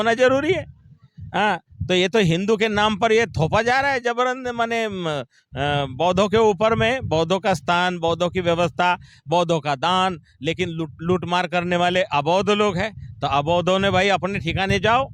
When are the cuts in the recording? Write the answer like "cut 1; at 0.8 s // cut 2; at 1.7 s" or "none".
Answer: none